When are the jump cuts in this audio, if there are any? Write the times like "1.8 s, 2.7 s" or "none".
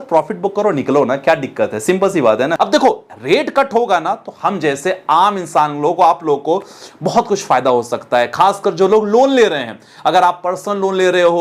2.5 s